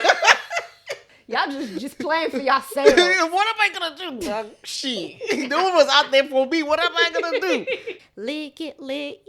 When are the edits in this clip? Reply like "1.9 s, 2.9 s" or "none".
1.1 s, 8.0 s